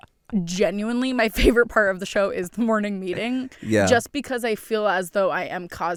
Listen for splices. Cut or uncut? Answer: uncut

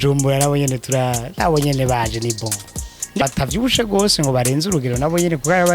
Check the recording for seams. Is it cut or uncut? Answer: cut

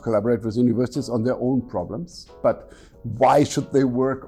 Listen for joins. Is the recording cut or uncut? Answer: uncut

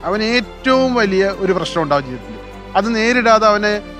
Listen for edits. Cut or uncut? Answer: uncut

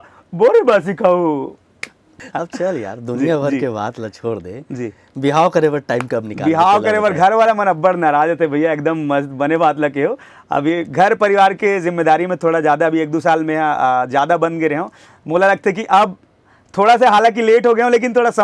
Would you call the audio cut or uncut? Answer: cut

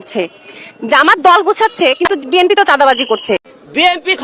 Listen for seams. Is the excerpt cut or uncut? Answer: uncut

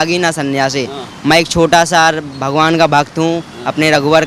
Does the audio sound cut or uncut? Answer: uncut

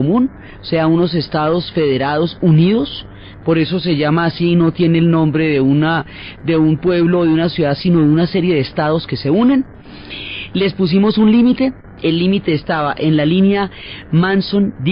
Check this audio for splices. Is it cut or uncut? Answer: uncut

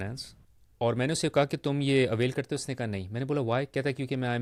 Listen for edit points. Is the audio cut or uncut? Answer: uncut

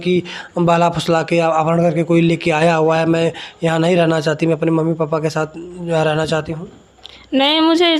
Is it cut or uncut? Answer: uncut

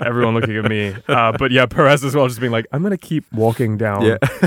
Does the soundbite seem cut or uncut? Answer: cut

